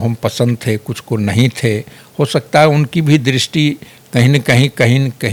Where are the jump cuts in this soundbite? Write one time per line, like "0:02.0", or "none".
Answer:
none